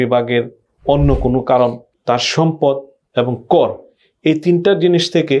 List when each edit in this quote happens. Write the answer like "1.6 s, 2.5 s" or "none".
1.9 s